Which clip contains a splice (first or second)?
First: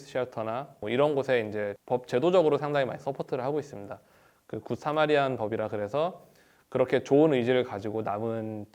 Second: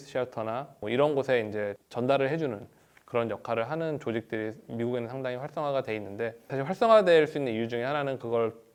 first